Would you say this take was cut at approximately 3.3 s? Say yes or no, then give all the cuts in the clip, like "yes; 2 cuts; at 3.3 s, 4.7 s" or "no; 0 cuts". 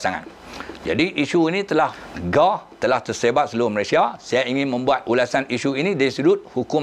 no; 2 cuts; at 2.0 s, 5.0 s